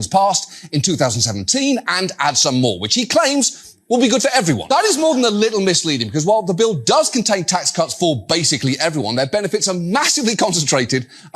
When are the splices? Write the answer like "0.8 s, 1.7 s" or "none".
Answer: 4.6 s